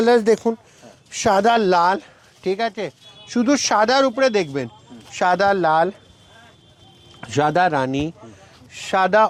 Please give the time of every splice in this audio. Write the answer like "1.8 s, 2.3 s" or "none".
none